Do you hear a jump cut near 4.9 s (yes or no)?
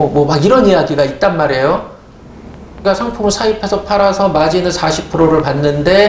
no